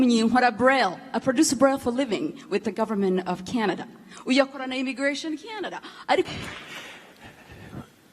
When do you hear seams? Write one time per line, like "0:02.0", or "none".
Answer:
0:06.3